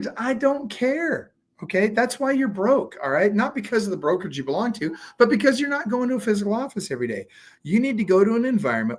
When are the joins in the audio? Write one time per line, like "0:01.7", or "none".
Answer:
none